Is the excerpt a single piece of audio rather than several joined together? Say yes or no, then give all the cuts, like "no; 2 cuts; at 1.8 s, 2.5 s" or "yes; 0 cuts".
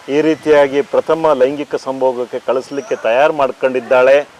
yes; 0 cuts